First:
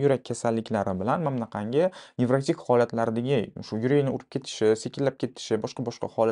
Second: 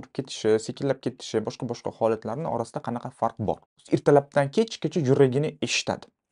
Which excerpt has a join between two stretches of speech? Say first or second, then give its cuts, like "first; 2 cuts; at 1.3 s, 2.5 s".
second; 1 cut; at 3.8 s